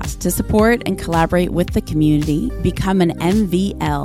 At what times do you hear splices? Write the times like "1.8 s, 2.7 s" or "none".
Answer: none